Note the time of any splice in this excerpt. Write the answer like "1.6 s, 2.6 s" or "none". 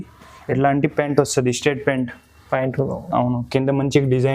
none